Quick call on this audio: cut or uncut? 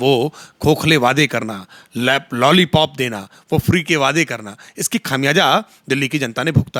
uncut